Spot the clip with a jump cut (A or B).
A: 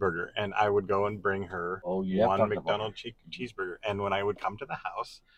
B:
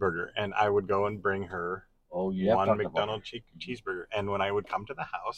A